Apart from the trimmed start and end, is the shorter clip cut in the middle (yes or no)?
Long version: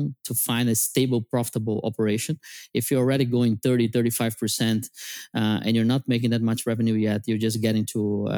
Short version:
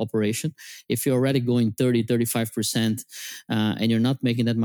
no